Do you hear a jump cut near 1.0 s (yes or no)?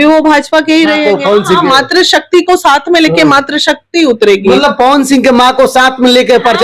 yes